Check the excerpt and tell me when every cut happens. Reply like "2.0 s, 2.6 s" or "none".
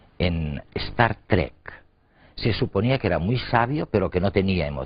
2.6 s